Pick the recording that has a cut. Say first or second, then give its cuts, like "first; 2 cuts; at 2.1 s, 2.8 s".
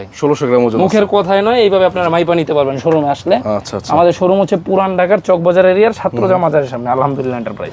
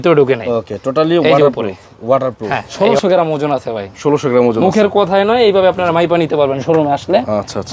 second; 1 cut; at 2.6 s